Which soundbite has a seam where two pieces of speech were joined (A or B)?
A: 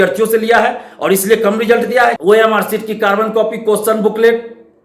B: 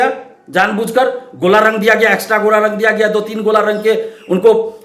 A